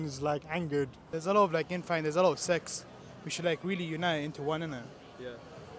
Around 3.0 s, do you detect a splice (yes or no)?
no